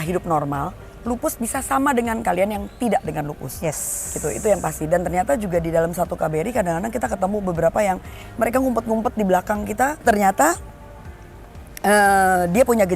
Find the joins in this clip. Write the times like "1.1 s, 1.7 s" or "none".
none